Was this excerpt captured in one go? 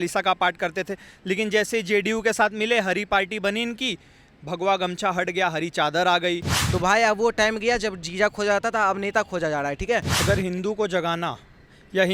no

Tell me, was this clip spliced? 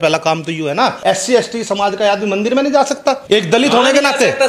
yes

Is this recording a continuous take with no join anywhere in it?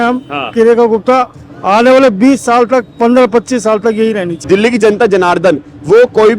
no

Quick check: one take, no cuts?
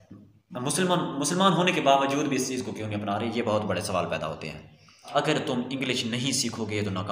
no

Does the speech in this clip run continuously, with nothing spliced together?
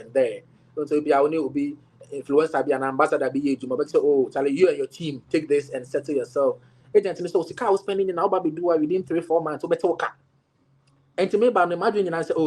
no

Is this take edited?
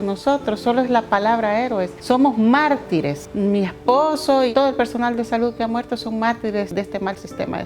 yes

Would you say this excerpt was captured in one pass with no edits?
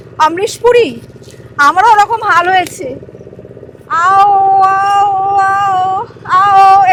yes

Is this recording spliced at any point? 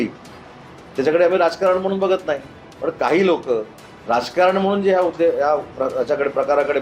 no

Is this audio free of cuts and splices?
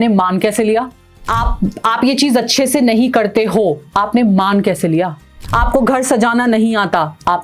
yes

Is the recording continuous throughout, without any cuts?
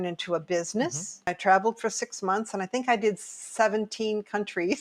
no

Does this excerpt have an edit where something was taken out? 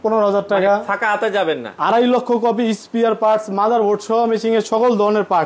yes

